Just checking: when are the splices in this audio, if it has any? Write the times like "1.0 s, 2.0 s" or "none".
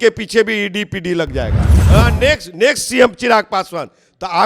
1.7 s